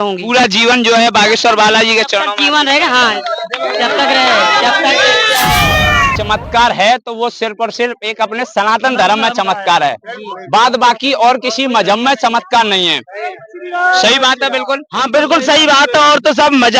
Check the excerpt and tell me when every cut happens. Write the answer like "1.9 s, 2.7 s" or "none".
6.1 s